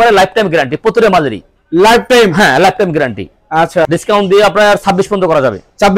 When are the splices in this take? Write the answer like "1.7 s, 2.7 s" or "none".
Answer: 3.8 s